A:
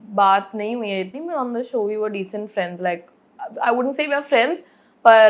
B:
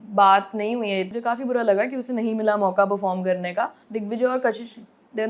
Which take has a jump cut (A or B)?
B